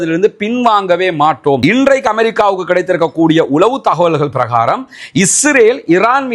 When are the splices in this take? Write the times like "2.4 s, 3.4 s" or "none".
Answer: 1.6 s